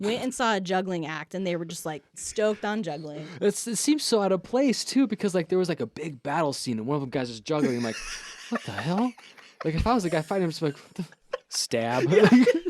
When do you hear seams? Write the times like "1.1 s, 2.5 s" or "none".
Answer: 2.2 s, 3.1 s